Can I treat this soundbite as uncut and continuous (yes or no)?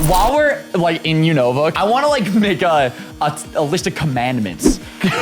no